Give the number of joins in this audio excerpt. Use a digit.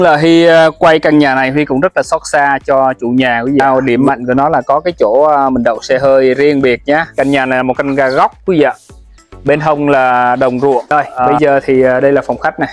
3